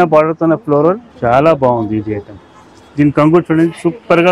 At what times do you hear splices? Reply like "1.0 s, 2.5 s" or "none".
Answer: 1.1 s